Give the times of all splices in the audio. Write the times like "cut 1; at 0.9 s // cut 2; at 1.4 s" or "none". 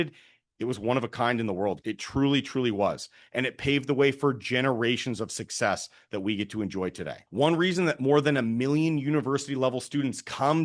cut 1; at 1.8 s // cut 2; at 7.2 s